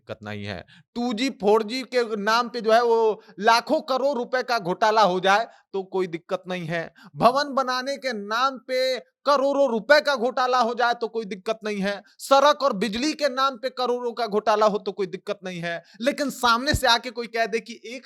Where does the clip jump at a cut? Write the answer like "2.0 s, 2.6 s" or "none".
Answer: none